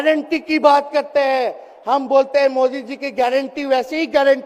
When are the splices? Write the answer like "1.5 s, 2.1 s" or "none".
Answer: none